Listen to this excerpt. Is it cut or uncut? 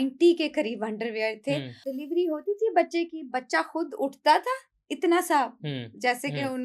cut